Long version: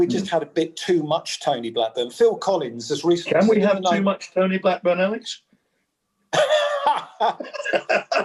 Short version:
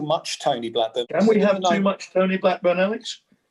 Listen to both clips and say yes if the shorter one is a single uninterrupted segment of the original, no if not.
no